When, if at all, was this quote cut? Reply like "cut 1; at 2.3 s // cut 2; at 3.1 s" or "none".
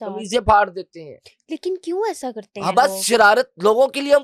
none